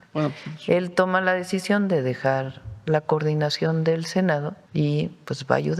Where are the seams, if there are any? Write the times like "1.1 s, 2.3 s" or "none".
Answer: 4.6 s